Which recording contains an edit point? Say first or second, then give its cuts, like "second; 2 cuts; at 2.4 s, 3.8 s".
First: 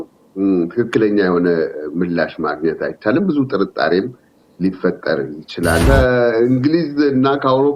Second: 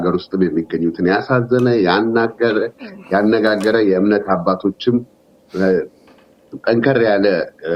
first; 1 cut; at 5.8 s